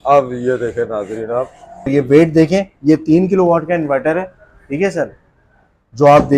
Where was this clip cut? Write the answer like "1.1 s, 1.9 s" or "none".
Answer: 1.9 s